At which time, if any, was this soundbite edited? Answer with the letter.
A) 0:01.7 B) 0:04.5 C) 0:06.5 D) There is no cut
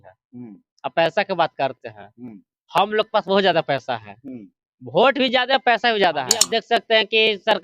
C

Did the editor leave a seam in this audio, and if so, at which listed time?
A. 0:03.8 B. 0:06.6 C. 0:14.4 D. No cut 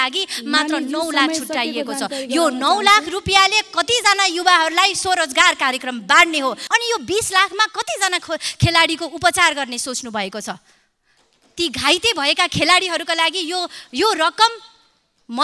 B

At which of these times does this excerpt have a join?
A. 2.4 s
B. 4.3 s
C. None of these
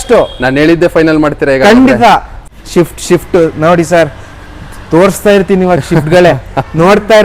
A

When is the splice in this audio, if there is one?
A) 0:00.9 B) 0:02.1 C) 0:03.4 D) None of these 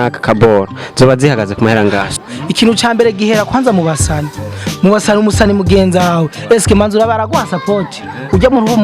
B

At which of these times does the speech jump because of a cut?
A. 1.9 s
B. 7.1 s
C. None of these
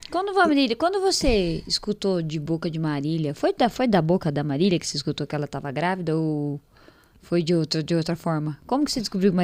C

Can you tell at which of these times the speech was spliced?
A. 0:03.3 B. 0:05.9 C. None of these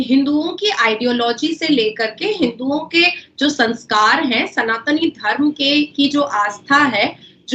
C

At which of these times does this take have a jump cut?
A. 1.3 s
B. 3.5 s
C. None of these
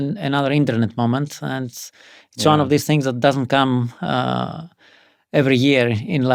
C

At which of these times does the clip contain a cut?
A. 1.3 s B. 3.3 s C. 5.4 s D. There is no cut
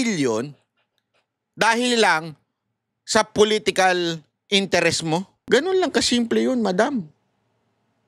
C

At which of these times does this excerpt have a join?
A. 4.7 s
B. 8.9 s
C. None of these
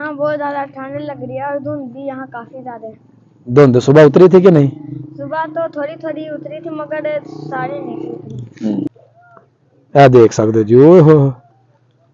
B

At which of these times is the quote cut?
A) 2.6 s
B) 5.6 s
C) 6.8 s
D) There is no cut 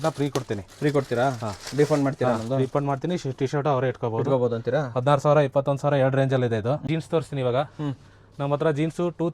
C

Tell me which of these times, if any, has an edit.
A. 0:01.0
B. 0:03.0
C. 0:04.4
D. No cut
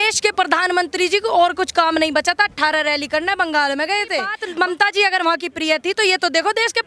C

